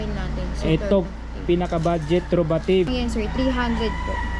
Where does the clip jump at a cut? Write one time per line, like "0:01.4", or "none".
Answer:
none